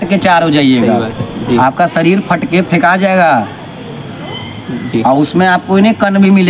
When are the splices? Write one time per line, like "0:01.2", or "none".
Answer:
none